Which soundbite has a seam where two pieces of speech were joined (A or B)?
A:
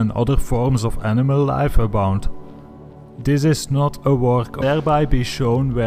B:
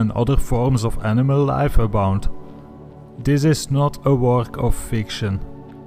B